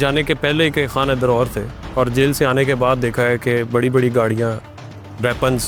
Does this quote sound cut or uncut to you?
uncut